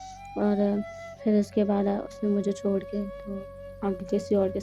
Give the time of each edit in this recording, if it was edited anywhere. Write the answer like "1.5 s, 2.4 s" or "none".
none